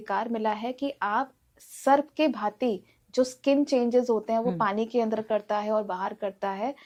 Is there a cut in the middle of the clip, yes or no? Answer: no